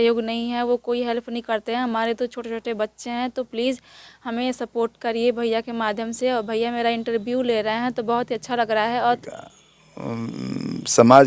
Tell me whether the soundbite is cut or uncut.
cut